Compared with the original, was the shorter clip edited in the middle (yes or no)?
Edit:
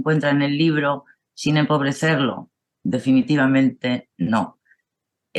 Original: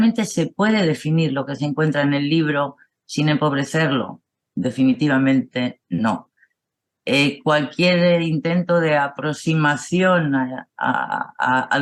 no